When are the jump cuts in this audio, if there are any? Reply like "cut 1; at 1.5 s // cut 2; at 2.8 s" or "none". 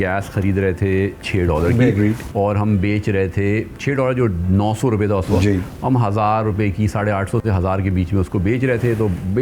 none